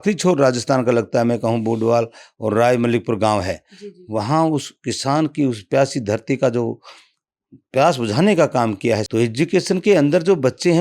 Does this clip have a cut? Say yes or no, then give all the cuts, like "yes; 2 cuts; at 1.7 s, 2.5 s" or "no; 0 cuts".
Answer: yes; 1 cut; at 9.1 s